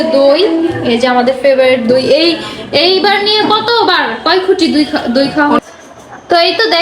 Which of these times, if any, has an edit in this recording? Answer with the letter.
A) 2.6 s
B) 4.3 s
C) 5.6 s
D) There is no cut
C